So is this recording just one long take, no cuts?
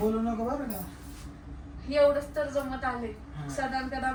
yes; 0 cuts

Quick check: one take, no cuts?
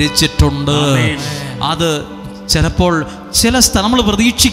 yes; 0 cuts

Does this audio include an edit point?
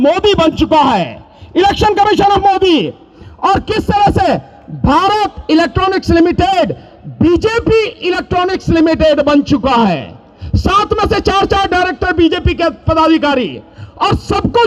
no; 0 cuts

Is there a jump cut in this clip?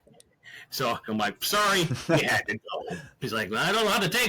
yes; 2 cuts; at 1.1 s, 3.1 s

